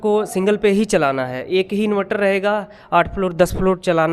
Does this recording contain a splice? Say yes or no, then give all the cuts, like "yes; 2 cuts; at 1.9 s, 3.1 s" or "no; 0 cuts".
no; 0 cuts